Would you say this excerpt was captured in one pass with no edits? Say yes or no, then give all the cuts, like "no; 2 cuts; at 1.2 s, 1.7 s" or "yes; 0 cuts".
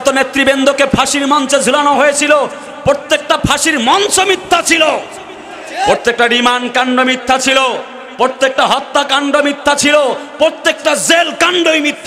yes; 0 cuts